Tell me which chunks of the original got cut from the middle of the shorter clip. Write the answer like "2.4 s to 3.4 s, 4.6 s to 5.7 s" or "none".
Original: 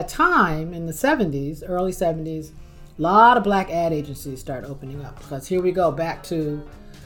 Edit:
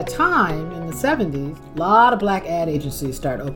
1.6 s to 2.8 s